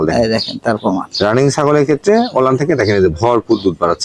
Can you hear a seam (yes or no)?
no